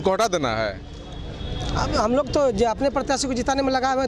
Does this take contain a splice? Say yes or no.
no